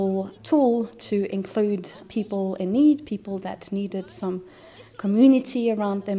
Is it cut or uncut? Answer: cut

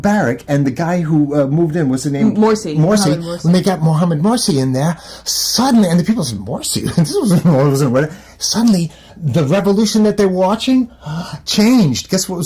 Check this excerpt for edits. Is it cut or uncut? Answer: uncut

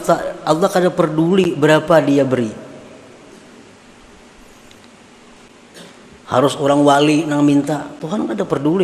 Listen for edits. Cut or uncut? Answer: uncut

